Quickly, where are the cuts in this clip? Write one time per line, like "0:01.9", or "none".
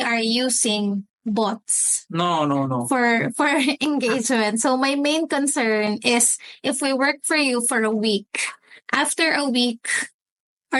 none